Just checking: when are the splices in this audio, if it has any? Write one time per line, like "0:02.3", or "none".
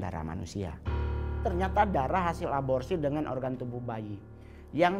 0:01.3